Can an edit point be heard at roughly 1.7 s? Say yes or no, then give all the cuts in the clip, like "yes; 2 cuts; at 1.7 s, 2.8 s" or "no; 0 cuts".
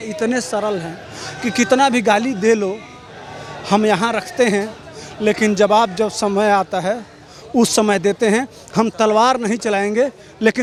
no; 0 cuts